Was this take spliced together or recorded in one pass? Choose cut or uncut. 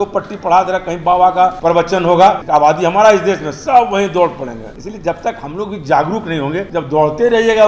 cut